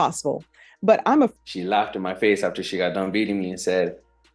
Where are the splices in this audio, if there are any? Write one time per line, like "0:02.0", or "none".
0:01.3